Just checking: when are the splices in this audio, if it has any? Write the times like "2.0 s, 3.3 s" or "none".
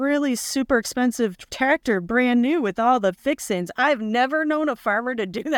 none